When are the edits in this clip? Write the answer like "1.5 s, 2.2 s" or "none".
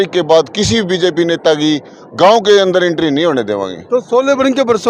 none